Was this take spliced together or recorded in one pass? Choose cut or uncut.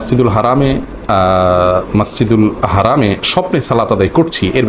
uncut